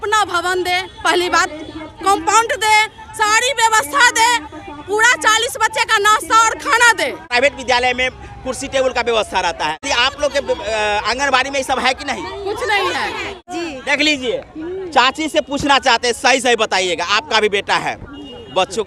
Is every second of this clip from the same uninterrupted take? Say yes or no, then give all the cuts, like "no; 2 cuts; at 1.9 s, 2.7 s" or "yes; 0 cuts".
no; 3 cuts; at 7.3 s, 9.8 s, 13.5 s